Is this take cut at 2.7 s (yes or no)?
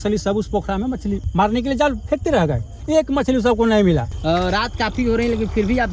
no